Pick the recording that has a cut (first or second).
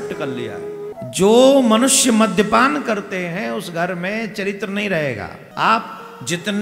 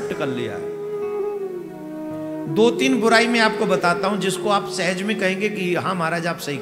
first